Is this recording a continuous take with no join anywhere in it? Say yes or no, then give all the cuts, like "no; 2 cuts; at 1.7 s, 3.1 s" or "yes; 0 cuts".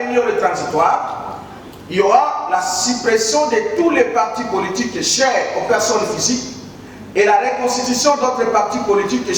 yes; 0 cuts